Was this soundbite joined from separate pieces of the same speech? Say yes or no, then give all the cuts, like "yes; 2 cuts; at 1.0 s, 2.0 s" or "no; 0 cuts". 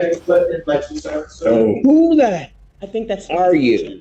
no; 0 cuts